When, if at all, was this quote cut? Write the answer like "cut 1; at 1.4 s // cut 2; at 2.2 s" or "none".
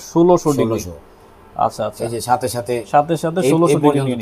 none